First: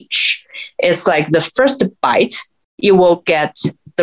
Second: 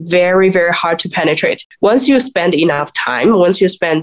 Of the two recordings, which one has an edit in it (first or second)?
second